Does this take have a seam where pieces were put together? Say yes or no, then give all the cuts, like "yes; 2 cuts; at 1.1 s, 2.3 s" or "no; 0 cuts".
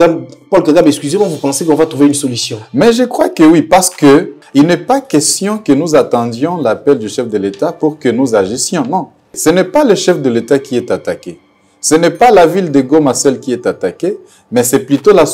yes; 2 cuts; at 4.4 s, 9.3 s